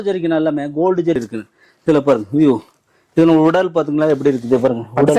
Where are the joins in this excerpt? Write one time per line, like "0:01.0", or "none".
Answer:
0:01.1